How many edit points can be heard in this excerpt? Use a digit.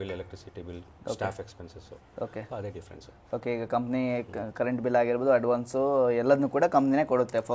0